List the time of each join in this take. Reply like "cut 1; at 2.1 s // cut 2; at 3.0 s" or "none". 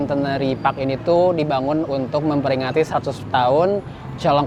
none